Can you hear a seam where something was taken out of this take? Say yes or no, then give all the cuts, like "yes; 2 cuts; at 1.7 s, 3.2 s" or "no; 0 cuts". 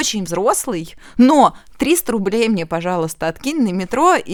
no; 0 cuts